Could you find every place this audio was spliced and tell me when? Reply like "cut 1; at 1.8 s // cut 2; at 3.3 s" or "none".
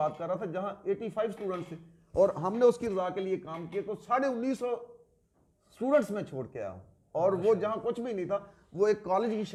none